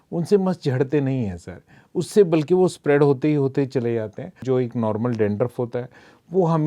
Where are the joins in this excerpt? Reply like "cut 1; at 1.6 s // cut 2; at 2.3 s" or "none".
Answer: cut 1; at 4.4 s